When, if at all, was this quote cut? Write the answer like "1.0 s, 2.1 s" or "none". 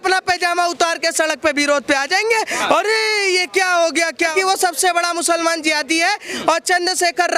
4.3 s, 6.3 s